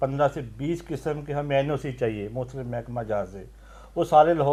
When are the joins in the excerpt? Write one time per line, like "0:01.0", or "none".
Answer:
none

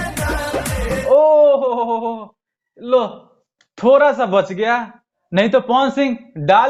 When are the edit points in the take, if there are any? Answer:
none

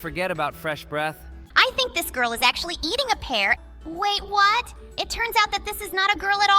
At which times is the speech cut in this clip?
0:01.4
0:03.6

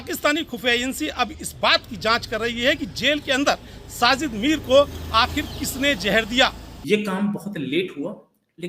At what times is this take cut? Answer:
0:06.7

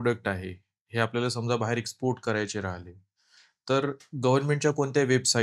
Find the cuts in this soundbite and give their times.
none

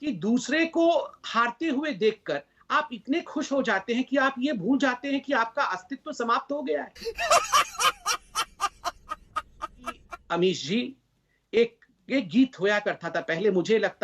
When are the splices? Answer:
0:10.1

